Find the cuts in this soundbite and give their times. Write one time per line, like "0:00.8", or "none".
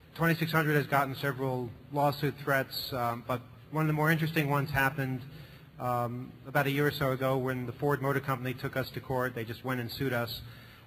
0:01.2